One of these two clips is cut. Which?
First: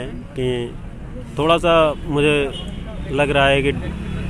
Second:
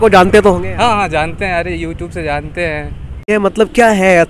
second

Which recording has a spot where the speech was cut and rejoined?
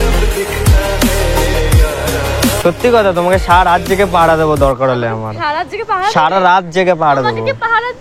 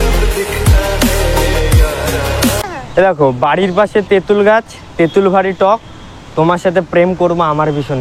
second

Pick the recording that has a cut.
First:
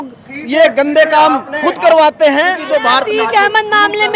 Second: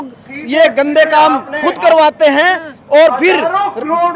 first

